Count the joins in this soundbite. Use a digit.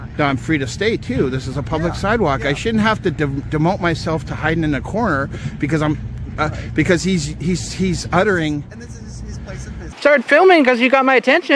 1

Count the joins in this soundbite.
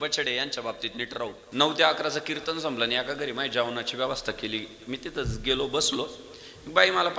1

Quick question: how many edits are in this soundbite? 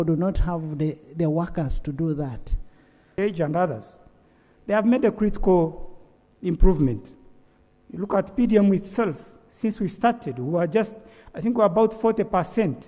1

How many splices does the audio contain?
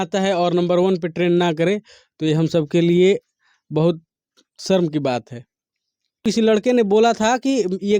1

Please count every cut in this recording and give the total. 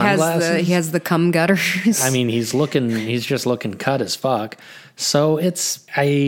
0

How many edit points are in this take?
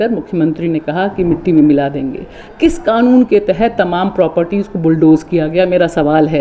0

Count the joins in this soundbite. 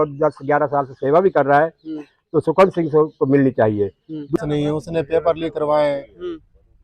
1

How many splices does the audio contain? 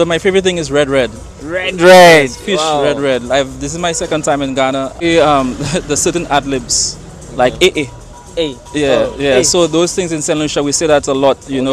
1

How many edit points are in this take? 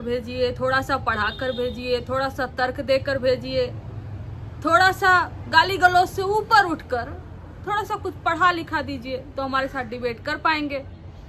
0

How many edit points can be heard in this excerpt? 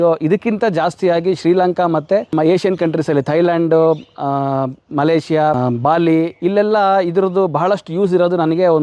2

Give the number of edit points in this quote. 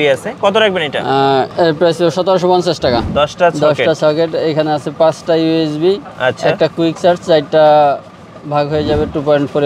1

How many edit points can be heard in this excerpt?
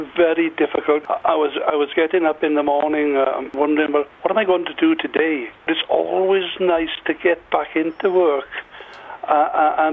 3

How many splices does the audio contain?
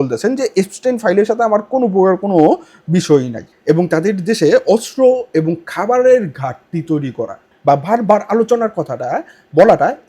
2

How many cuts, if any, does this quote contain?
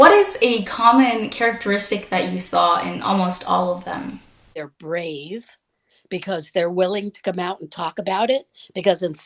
1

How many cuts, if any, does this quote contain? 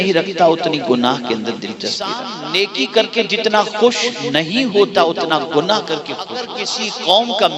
2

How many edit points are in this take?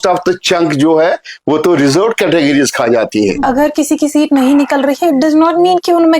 1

